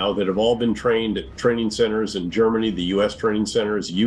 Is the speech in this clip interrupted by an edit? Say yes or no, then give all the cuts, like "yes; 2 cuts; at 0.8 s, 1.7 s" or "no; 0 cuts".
no; 0 cuts